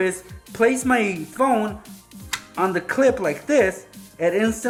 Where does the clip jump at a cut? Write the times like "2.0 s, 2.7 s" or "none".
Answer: none